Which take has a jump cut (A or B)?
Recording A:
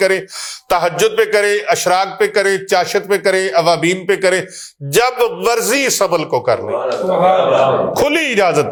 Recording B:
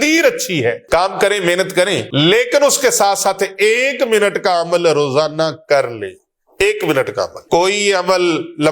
B